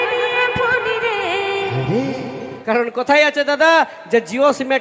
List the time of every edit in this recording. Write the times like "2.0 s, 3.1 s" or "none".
2.5 s